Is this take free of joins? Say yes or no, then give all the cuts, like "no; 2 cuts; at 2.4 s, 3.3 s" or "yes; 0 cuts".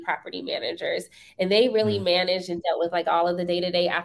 yes; 0 cuts